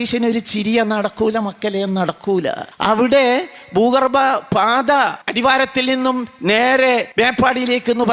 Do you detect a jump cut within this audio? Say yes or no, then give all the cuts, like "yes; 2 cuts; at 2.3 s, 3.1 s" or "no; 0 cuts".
yes; 3 cuts; at 2.7 s, 5.2 s, 7.1 s